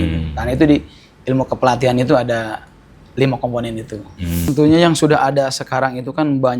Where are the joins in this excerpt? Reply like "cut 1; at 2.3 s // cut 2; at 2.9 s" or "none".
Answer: cut 1; at 4.5 s